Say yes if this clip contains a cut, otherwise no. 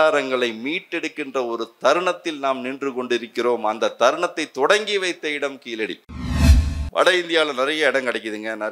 yes